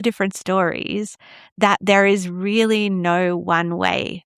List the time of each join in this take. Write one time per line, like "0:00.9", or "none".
0:01.5